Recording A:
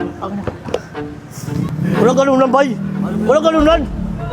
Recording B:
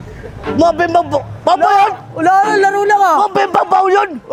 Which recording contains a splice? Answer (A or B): A